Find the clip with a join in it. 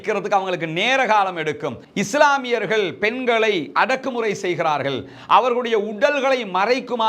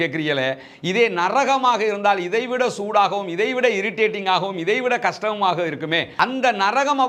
first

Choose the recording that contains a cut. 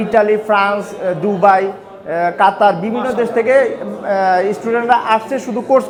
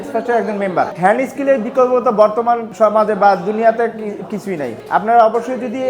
second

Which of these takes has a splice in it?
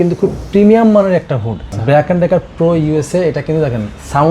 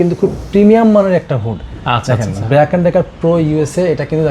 first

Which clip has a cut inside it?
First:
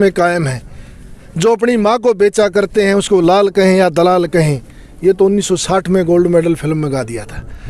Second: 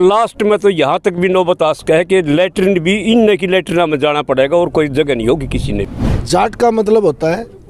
second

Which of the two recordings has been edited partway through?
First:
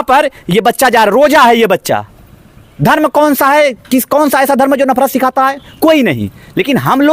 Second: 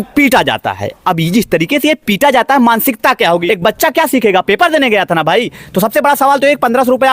second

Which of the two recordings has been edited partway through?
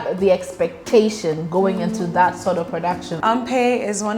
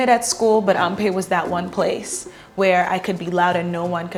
first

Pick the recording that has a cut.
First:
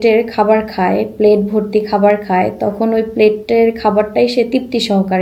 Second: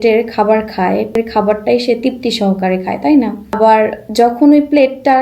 second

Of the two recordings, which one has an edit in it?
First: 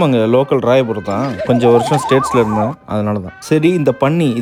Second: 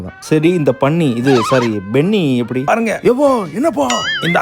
second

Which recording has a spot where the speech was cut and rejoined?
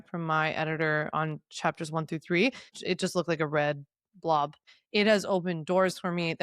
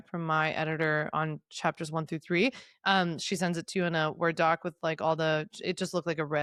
first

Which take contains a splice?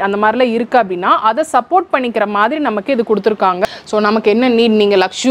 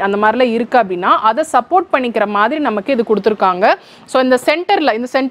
first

